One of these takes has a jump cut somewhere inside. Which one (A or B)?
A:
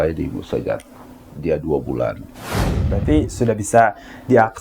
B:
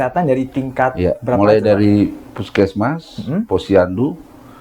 A